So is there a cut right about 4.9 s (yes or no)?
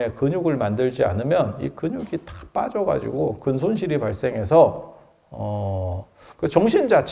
no